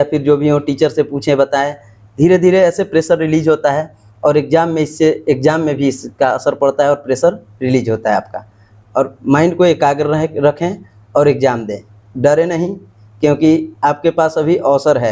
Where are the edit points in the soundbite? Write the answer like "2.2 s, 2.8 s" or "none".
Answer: none